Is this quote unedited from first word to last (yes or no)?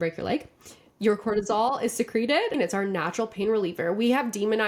no